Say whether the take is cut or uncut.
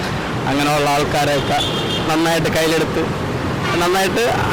uncut